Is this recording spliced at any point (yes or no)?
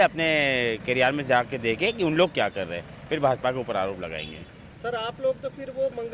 no